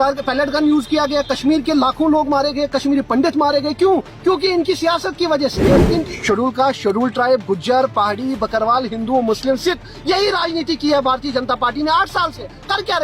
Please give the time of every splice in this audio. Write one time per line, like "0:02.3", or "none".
0:05.7